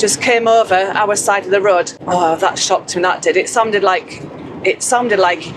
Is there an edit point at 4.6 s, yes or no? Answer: no